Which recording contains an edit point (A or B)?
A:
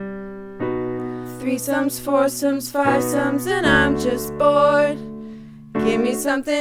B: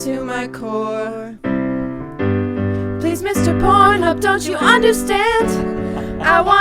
B